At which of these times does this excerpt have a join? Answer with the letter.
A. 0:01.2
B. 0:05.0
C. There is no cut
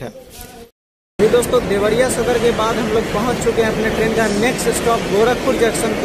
A